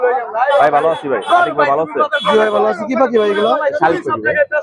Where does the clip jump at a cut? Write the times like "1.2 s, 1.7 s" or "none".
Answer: none

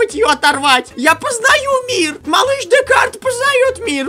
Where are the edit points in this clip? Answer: 0.9 s, 2.2 s

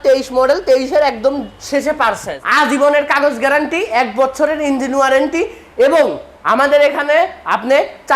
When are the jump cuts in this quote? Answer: 2.4 s

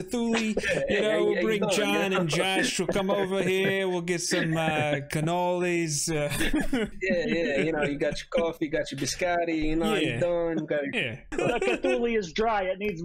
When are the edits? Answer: 6.9 s, 11.3 s

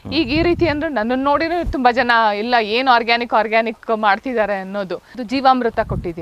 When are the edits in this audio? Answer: 5.2 s

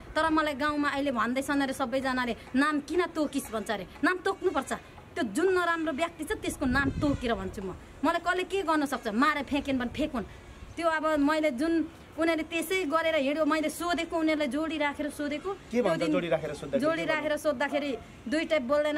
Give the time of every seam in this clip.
none

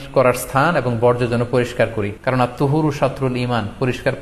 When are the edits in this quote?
2.1 s

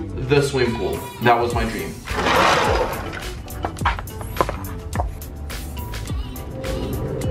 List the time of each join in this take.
none

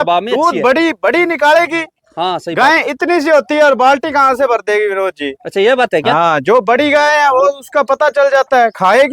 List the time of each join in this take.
none

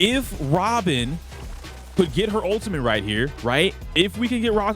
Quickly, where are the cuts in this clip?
3.8 s

